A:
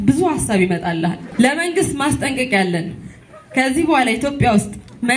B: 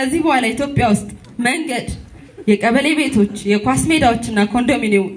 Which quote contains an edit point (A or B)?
A